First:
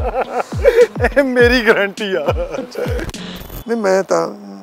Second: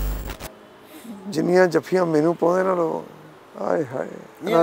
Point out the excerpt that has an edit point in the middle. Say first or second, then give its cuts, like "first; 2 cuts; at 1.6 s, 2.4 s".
first; 2 cuts; at 1.0 s, 3.1 s